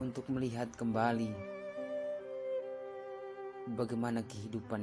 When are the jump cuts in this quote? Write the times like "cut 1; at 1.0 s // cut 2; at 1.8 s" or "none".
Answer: cut 1; at 1.4 s // cut 2; at 3.6 s

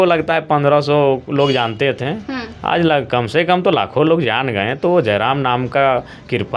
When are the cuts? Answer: none

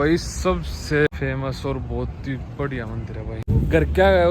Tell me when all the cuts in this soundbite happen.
cut 1; at 1.1 s // cut 2; at 3.4 s

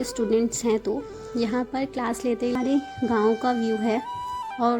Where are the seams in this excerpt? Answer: cut 1; at 2.5 s

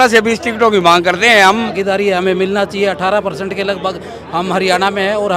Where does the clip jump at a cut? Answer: cut 1; at 1.8 s

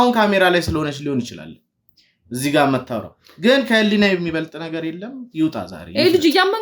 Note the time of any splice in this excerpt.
none

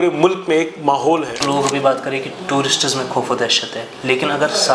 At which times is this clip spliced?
cut 1; at 1.4 s

